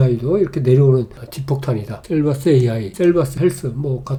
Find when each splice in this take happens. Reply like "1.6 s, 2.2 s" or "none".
none